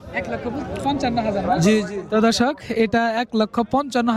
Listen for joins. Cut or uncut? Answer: uncut